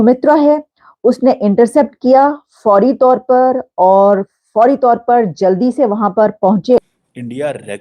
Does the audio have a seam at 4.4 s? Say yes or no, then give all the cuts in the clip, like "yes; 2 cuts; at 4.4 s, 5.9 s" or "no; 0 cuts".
no; 1 cut; at 6.8 s